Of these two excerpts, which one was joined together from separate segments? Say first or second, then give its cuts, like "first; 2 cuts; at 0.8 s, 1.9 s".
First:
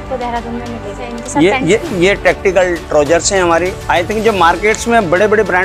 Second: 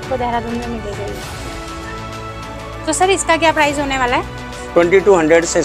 first; 2 cuts; at 1.1 s, 3.8 s